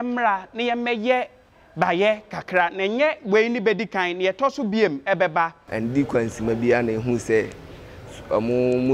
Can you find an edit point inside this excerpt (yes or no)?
yes